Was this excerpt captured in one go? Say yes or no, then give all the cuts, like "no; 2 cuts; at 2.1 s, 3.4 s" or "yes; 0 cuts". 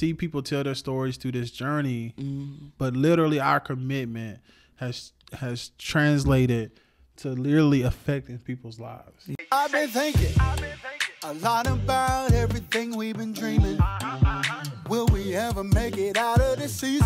no; 1 cut; at 9.3 s